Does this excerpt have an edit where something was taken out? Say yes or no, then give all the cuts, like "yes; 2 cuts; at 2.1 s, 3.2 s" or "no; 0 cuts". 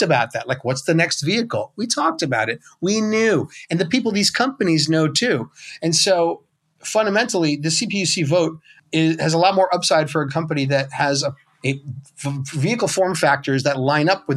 yes; 2 cuts; at 8.8 s, 11.5 s